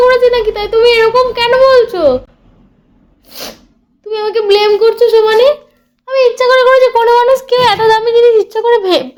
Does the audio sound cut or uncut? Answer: uncut